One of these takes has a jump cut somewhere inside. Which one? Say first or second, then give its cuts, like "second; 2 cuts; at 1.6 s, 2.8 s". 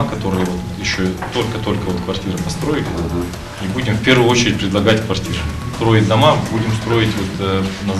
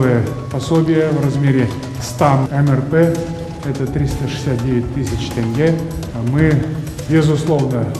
second; 1 cut; at 6.0 s